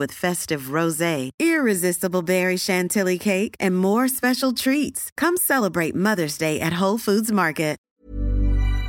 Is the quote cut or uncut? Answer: cut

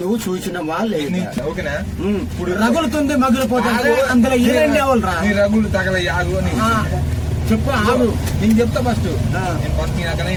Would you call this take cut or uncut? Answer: uncut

